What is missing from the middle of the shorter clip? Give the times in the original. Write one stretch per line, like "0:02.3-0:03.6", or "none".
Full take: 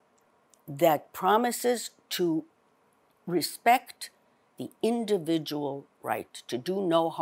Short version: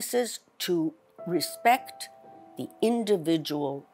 0:02.6-0:03.1